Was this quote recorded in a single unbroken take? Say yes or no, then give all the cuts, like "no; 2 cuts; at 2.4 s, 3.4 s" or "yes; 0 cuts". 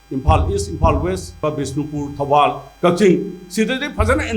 no; 1 cut; at 1.4 s